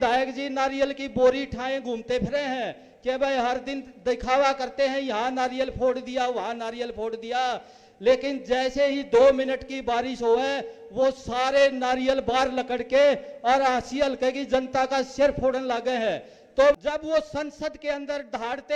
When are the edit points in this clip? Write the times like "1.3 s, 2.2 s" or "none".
16.7 s